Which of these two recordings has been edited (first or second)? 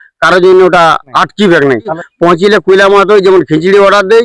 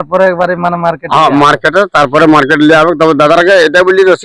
first